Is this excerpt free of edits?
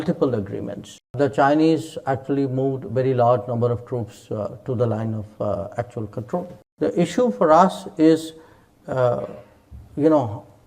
no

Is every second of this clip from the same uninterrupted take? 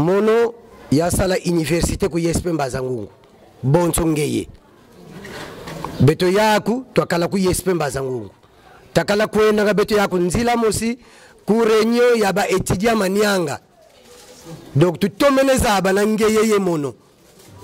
yes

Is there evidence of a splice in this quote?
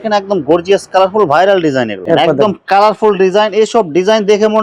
yes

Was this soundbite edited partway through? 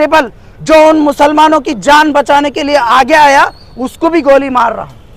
no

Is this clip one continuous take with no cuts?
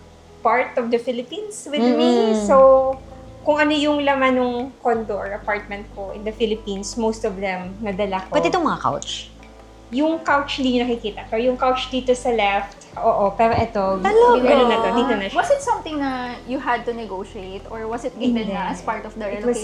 yes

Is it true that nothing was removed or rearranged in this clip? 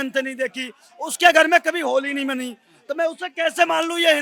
yes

